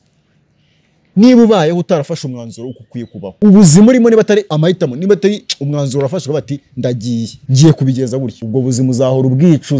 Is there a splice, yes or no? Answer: yes